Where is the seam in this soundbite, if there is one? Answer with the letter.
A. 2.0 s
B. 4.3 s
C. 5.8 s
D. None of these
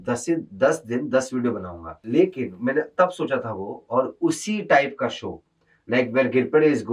A